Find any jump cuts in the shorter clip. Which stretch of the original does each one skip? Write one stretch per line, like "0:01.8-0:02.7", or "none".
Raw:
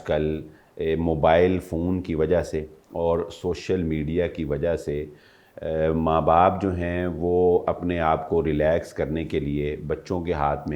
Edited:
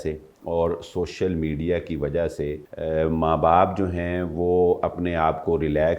0:05.1-0:05.5